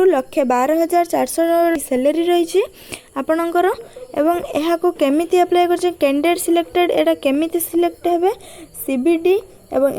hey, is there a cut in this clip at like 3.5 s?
no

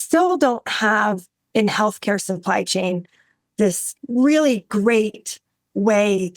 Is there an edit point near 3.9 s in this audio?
yes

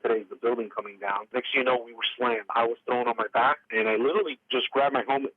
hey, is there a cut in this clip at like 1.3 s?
yes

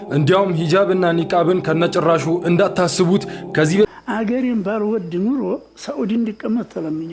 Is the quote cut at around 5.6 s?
no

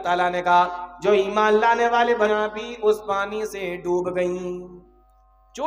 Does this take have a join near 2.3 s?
yes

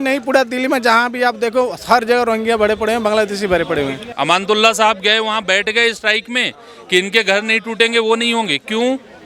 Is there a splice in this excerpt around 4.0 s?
yes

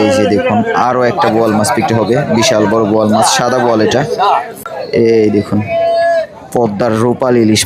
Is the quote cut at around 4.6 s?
yes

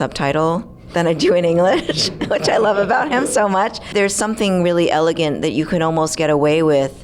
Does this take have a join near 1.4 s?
no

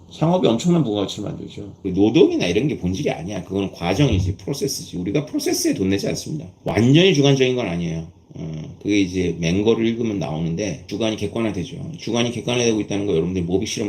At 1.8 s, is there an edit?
yes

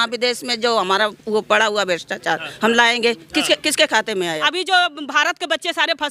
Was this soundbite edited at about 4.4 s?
yes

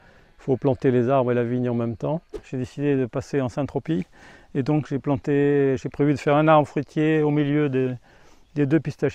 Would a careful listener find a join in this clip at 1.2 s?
no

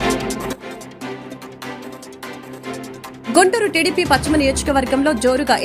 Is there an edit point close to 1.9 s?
yes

